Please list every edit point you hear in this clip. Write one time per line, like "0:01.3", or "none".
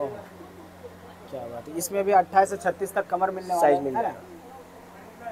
none